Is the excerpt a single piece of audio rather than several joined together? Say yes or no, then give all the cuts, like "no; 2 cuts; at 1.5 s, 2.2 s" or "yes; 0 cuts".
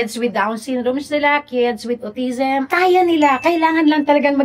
no; 1 cut; at 2.7 s